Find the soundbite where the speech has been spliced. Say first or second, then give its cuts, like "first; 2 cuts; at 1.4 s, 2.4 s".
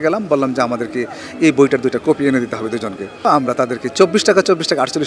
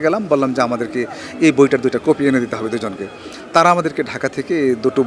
first; 1 cut; at 3.2 s